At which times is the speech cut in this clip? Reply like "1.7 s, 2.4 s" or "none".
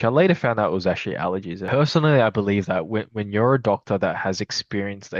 1.6 s